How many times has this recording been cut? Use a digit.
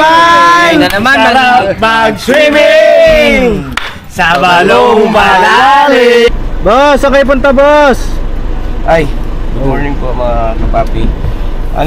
1